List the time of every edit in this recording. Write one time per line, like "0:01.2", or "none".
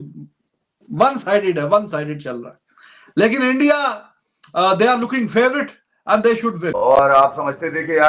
0:06.8